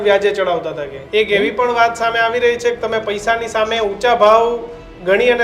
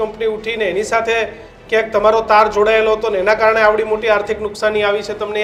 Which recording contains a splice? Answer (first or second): first